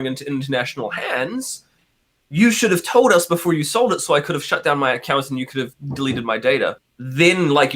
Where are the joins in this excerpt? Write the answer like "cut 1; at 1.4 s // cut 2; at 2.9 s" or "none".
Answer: cut 1; at 6.9 s